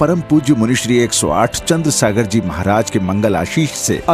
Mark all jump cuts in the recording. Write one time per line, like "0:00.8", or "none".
none